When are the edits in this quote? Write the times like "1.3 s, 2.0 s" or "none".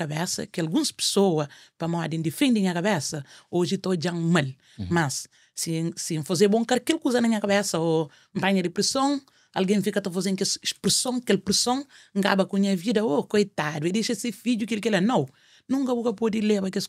none